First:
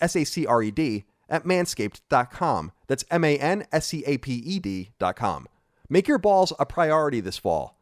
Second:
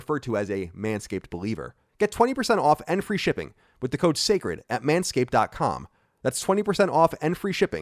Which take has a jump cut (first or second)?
second